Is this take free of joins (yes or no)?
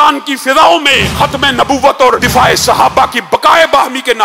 no